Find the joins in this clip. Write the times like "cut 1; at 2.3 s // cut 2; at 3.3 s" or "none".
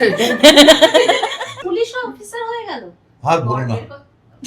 cut 1; at 1.5 s